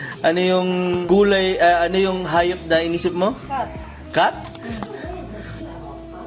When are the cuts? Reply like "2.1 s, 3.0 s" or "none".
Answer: 1.0 s